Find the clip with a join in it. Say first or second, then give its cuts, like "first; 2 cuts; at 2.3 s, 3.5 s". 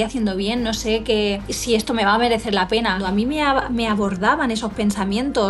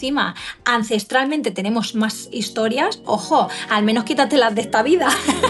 first; 2 cuts; at 1.5 s, 3.0 s